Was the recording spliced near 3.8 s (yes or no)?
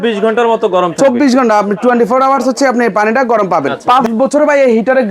yes